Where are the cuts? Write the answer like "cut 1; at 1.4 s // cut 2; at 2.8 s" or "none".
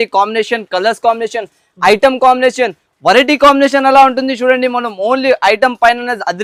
none